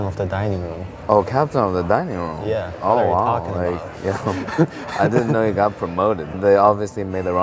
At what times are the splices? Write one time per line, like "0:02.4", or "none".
none